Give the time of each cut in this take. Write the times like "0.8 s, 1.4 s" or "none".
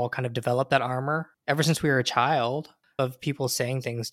1.3 s, 2.9 s